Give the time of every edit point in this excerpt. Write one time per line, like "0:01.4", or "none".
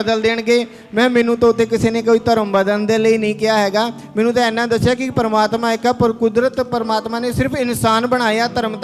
none